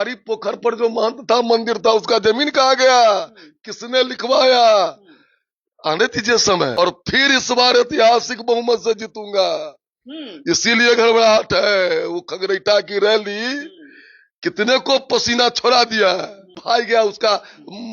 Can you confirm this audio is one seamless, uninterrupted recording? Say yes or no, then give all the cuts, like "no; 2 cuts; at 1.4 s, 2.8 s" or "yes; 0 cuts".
no; 2 cuts; at 6.8 s, 16.5 s